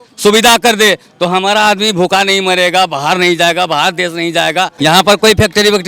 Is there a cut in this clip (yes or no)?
yes